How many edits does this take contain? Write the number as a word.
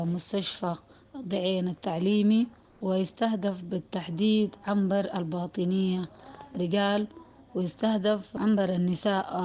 two